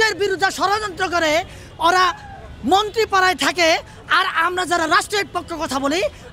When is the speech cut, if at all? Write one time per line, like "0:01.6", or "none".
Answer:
none